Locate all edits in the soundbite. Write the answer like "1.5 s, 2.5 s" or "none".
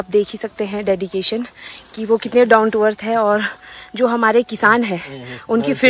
none